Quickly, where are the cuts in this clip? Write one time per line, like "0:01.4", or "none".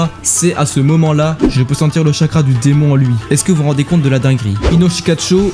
0:01.5
0:04.6